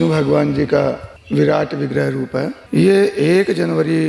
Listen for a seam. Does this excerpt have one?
yes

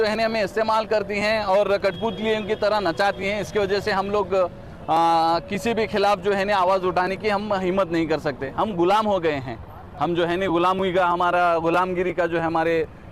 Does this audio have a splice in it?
no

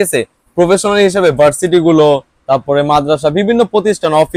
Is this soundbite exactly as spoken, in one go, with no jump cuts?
yes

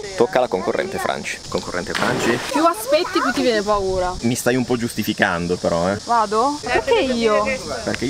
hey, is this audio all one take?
no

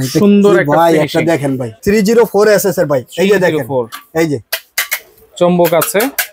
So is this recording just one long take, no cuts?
no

